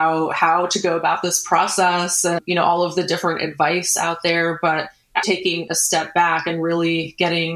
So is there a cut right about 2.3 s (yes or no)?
no